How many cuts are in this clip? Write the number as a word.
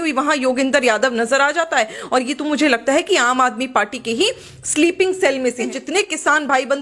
one